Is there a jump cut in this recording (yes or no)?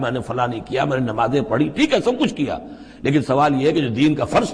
no